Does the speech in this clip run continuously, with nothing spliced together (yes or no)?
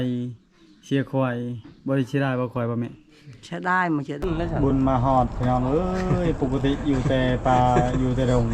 no